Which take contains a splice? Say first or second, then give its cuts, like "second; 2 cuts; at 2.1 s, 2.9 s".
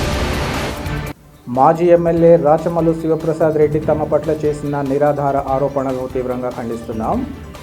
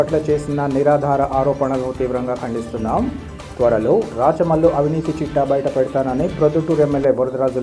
first; 1 cut; at 0.9 s